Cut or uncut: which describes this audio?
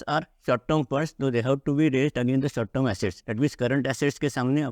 cut